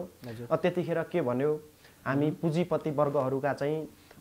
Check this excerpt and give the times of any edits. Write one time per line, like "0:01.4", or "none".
none